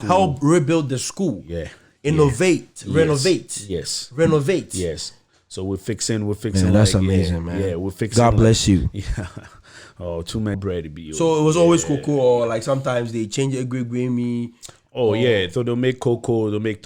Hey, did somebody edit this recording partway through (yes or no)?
yes